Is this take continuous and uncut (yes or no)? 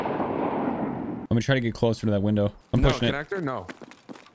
no